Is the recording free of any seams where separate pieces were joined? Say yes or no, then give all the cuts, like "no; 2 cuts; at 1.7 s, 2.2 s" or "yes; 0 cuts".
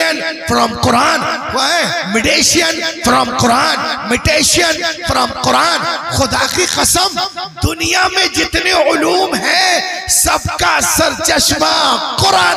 yes; 0 cuts